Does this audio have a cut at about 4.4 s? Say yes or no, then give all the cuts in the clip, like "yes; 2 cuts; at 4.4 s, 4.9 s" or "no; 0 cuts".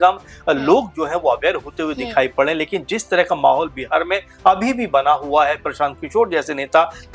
no; 0 cuts